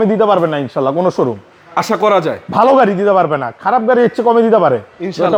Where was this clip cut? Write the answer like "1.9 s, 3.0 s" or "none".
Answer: none